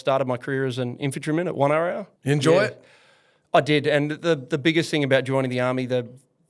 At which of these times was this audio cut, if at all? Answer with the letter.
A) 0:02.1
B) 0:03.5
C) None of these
A